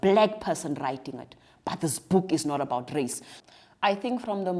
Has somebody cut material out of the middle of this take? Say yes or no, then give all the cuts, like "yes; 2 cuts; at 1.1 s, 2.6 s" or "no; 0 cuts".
yes; 1 cut; at 3.3 s